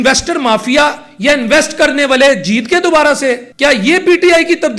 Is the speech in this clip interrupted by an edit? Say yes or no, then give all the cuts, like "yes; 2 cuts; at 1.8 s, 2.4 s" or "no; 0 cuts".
yes; 1 cut; at 3.5 s